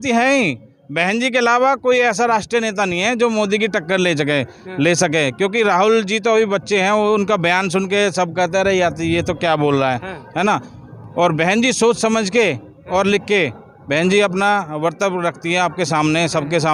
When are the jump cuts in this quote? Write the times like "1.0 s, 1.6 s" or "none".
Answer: none